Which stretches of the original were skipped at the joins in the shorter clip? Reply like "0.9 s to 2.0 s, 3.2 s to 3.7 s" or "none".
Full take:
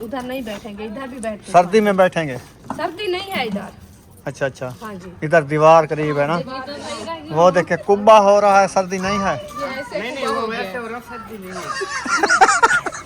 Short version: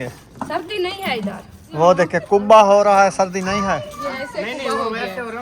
3.9 s to 7.2 s

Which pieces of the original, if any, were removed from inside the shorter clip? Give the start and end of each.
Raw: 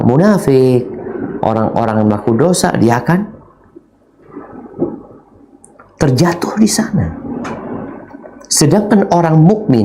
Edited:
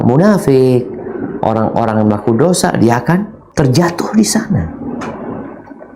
3.4 s to 5.8 s

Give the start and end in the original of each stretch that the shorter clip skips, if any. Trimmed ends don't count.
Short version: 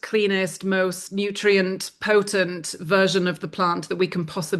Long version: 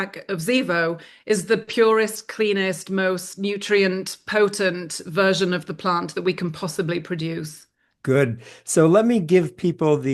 none

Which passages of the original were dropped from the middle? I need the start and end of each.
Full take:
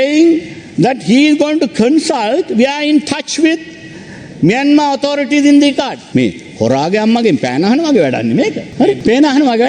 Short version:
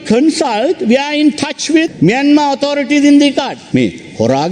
3.6 s to 4.3 s

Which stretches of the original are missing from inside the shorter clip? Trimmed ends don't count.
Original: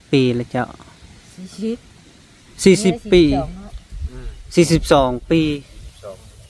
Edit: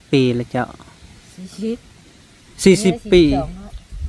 none

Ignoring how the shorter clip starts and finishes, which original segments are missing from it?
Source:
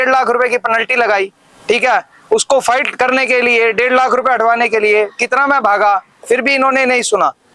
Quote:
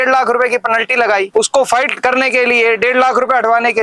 1.3 s to 2.2 s

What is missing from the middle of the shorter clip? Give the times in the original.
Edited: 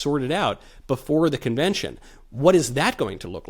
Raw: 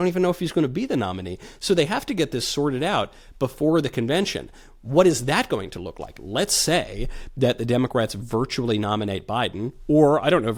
none

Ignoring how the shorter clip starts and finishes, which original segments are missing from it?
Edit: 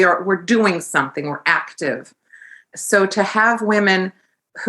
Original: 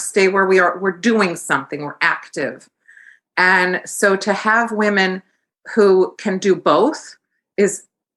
3.3 s to 3.8 s

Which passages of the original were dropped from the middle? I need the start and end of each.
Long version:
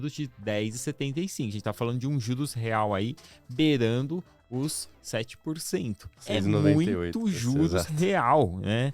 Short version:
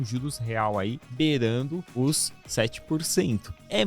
3.2 s to 3.4 s, 4.3 s to 4.4 s

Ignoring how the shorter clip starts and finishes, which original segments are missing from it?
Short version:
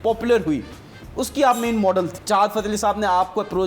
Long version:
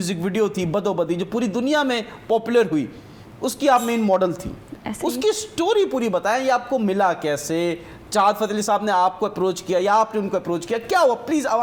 4.4 s to 8.0 s

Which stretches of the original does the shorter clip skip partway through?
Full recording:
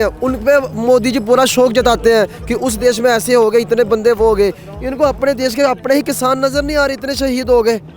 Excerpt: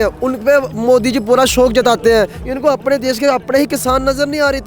2.4 s to 4.8 s

